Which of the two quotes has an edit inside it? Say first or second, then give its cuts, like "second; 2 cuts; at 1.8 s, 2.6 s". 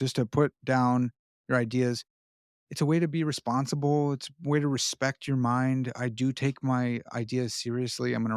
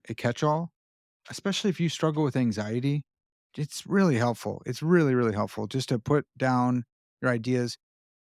second; 1 cut; at 1.2 s